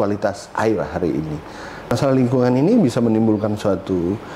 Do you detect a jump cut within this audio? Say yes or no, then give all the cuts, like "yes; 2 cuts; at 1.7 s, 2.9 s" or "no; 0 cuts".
yes; 1 cut; at 1.9 s